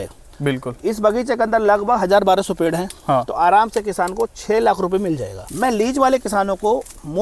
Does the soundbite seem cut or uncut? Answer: cut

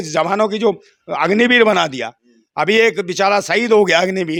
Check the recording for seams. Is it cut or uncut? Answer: uncut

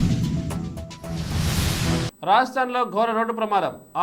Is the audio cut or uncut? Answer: cut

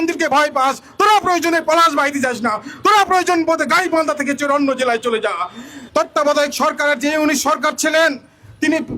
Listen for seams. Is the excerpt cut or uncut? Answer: cut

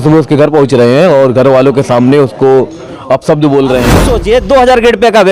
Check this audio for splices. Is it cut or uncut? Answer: cut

